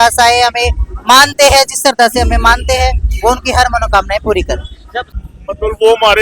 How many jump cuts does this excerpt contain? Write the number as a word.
one